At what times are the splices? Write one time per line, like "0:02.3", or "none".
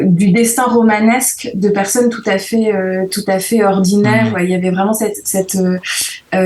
0:04.3

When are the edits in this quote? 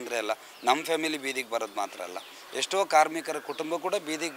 none

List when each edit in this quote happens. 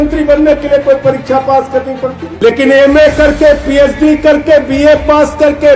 0:02.2

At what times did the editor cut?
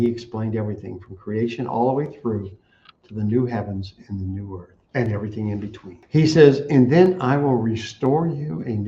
0:04.8
0:05.9

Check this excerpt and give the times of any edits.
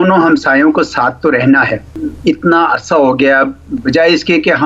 0:02.0

